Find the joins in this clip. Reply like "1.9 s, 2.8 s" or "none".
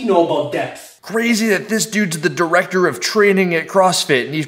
1.0 s